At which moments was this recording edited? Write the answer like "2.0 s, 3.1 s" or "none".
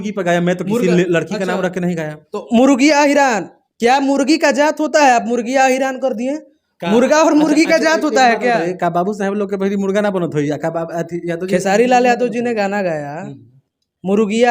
none